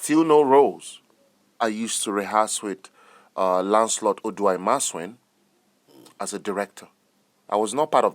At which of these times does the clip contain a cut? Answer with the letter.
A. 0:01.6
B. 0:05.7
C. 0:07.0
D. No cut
A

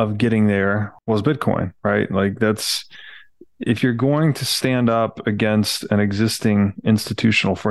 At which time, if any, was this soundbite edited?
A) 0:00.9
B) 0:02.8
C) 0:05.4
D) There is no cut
A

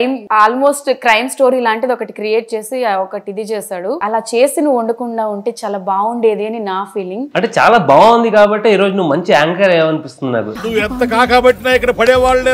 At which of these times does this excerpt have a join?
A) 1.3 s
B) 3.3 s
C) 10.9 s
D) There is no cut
D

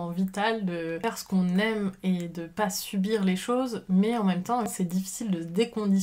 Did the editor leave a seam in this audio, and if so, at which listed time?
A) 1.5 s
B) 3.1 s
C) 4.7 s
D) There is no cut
C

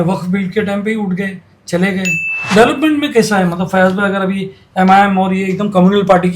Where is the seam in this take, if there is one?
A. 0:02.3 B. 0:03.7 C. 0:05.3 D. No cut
A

